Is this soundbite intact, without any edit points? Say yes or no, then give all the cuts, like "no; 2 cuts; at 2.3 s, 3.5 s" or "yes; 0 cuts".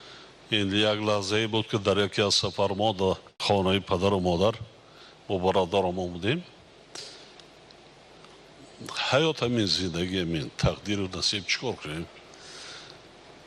no; 1 cut; at 3.3 s